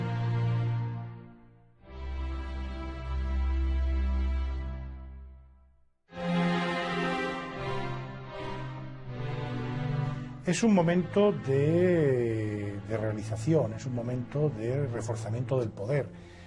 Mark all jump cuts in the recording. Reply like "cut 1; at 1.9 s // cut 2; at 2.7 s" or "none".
cut 1; at 10.4 s